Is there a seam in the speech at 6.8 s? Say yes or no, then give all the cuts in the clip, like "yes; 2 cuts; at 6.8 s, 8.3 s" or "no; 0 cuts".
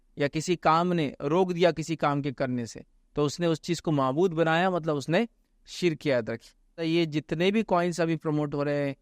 yes; 1 cut; at 6.8 s